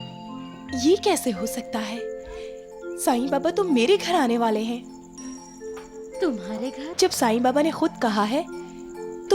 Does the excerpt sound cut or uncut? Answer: cut